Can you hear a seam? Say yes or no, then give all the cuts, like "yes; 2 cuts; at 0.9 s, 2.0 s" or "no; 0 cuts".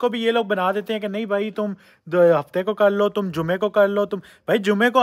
no; 0 cuts